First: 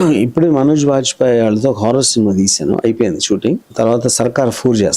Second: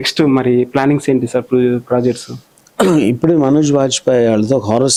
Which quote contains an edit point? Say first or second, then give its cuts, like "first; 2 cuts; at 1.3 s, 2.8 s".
first; 1 cut; at 3.6 s